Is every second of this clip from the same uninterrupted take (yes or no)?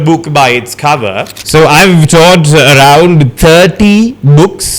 no